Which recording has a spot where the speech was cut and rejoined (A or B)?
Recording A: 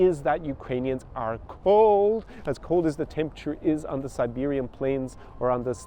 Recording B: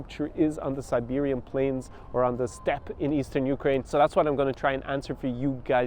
B